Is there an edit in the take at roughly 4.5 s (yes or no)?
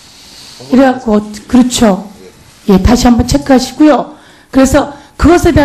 no